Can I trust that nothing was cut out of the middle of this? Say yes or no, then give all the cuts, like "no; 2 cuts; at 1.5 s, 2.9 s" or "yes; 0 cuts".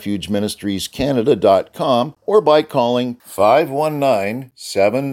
no; 1 cut; at 2.2 s